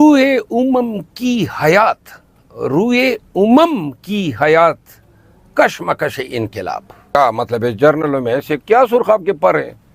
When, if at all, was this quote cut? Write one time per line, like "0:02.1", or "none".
0:07.2